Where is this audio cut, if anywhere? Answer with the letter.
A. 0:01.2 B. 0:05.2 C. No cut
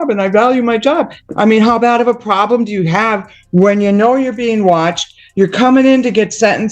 A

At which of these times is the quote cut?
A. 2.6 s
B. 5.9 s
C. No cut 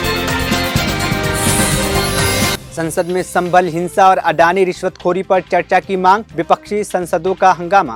C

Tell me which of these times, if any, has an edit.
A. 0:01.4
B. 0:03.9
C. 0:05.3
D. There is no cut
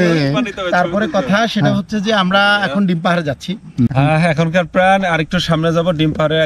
B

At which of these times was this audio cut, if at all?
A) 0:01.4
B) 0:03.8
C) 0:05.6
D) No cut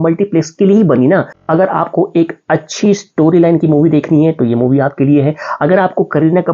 A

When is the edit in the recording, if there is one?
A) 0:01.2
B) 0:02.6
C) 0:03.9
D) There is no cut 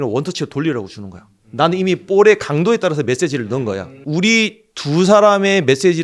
C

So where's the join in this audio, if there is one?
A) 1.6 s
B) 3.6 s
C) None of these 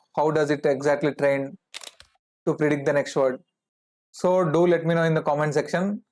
B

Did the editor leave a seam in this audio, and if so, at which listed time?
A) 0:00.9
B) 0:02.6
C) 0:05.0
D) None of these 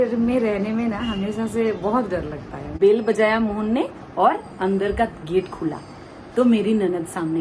B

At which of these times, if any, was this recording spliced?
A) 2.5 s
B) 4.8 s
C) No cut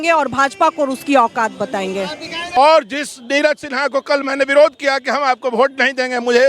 A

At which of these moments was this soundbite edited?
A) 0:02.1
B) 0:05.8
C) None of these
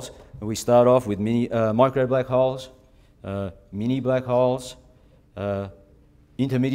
A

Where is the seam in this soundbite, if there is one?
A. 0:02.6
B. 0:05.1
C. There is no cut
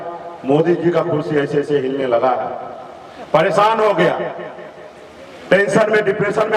C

